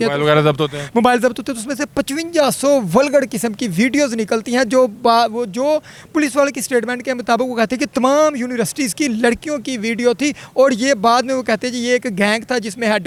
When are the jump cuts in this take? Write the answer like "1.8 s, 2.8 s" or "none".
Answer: none